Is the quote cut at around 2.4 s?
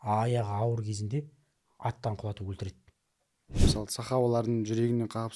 no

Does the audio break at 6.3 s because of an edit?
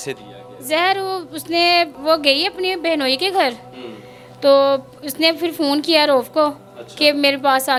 no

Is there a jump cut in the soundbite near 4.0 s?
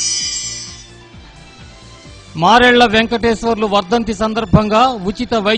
no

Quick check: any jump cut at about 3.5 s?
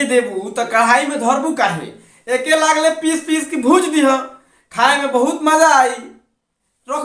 no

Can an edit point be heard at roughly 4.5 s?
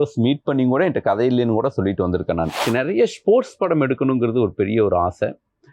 no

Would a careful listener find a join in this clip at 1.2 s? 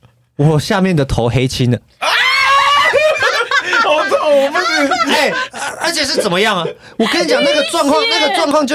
no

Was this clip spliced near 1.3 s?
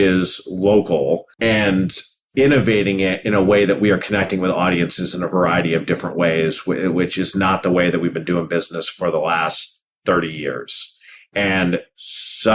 yes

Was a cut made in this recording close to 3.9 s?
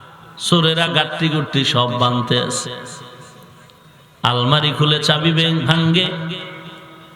no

